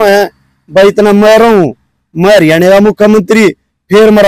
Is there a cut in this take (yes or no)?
no